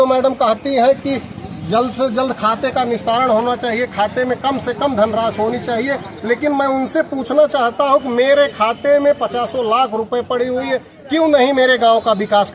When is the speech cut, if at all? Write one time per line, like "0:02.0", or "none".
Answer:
none